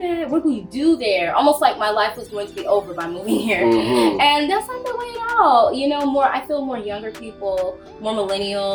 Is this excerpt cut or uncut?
uncut